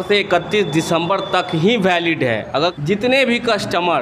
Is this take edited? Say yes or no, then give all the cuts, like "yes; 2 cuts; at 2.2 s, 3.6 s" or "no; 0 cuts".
yes; 1 cut; at 2.8 s